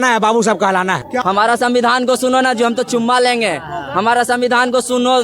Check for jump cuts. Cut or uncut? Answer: cut